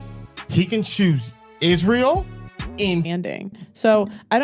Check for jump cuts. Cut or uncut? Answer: cut